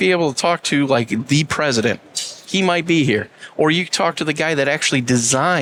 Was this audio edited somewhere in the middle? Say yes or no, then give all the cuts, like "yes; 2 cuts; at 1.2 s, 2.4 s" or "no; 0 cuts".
no; 0 cuts